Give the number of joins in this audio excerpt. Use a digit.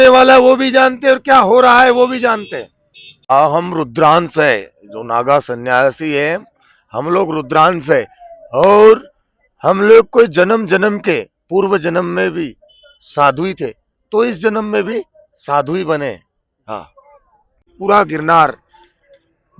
2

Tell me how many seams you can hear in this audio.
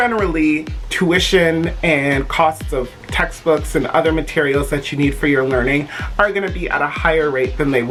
0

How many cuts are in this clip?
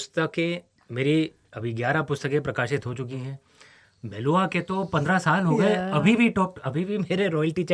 1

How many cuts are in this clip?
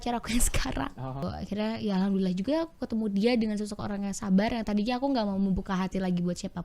1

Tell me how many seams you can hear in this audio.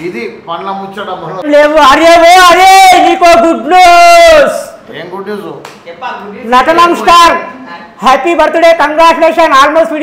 1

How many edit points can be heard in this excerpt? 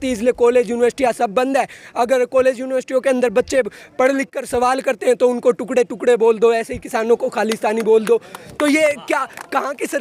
0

